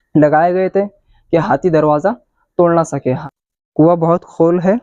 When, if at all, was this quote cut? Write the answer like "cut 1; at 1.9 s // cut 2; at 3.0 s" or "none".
cut 1; at 3.2 s